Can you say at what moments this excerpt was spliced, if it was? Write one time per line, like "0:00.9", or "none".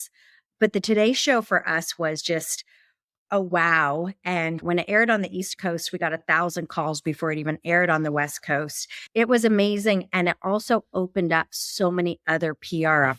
0:04.6
0:09.1

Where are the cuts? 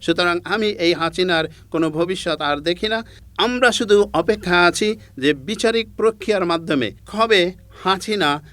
0:03.2
0:07.0

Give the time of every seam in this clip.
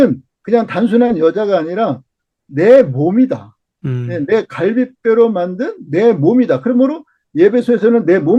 none

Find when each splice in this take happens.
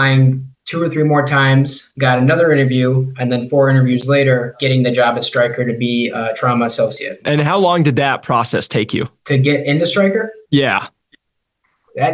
0:04.6
0:07.2

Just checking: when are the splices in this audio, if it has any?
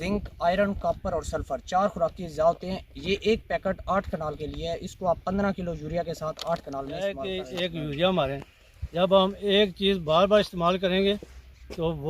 0:07.2

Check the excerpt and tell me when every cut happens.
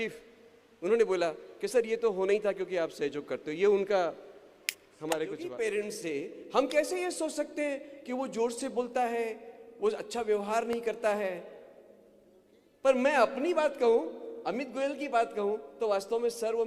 0:05.5

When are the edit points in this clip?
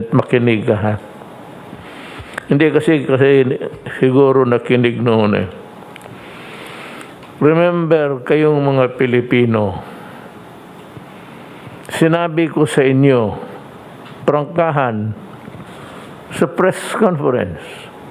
none

